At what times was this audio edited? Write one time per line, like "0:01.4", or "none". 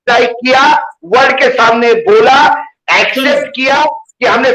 none